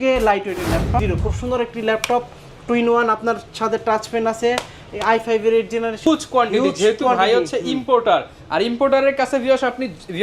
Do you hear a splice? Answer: yes; 2 cuts; at 1.0 s, 6.1 s

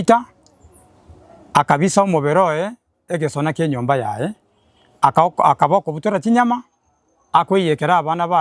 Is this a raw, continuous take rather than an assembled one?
yes; 0 cuts

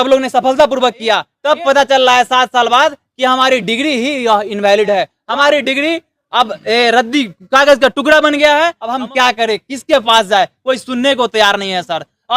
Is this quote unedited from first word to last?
no; 3 cuts; at 1.3 s, 5.2 s, 8.8 s

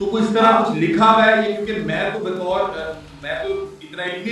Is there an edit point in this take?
no; 0 cuts

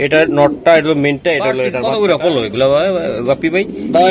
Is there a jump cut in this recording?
yes; 1 cut; at 1.8 s

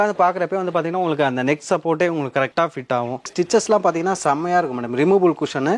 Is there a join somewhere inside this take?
yes; 1 cut; at 3.3 s

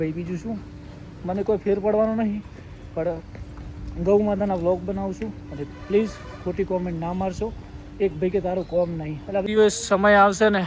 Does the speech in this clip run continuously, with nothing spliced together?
no; 1 cut; at 9.4 s

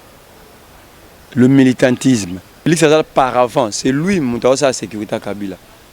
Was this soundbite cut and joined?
yes; 1 cut; at 2.7 s

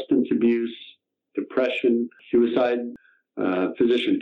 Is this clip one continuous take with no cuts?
no; 2 cuts; at 2.2 s, 2.9 s

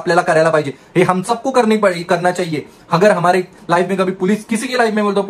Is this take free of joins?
yes; 0 cuts

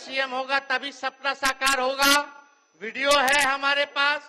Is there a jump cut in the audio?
no; 0 cuts

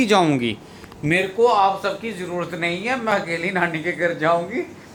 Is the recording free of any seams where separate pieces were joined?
yes; 0 cuts

